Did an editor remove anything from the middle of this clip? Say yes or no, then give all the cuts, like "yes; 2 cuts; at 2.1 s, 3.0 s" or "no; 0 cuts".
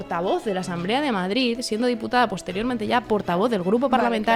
no; 0 cuts